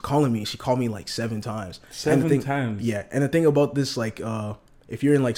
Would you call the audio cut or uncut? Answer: uncut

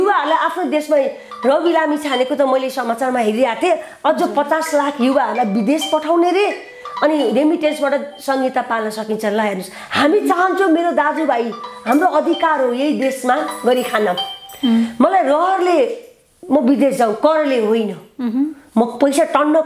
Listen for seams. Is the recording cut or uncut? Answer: uncut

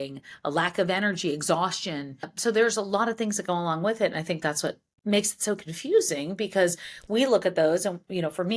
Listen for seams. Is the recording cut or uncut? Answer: cut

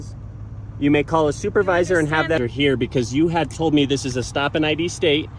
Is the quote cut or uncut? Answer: cut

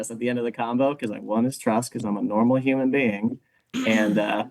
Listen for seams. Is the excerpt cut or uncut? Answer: uncut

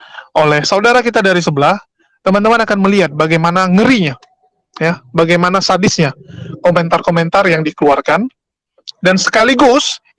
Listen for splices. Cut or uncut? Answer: uncut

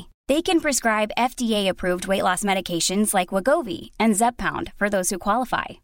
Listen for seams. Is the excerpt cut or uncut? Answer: uncut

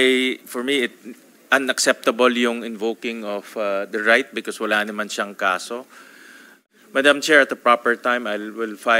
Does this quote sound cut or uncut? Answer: cut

